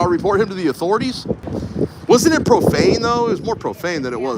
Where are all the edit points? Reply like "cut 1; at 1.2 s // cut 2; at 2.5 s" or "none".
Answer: cut 1; at 1.6 s